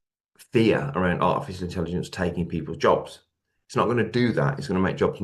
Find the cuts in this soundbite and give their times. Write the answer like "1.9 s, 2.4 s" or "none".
none